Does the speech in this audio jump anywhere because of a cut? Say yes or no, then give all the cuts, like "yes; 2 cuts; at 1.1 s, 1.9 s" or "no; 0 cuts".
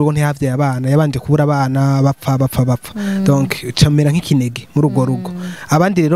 no; 0 cuts